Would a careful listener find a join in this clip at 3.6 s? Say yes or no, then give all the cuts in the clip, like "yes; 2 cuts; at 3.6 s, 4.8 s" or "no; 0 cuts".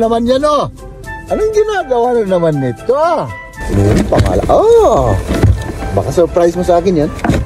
yes; 1 cut; at 3.6 s